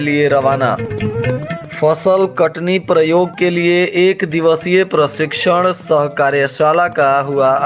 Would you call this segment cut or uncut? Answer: uncut